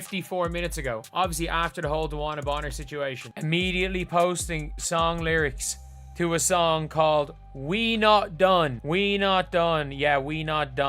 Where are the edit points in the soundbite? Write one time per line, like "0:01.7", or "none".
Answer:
0:03.3
0:08.8